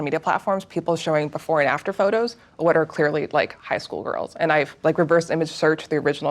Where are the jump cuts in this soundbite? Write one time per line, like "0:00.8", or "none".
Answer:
0:04.8